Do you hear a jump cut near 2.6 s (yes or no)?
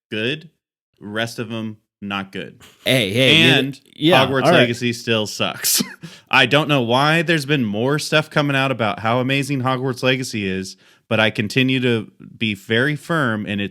yes